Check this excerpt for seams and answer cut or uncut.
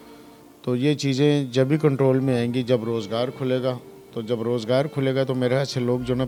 uncut